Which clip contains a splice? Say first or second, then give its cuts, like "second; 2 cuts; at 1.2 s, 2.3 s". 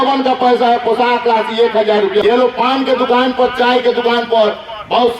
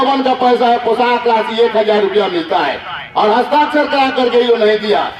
first; 1 cut; at 2.2 s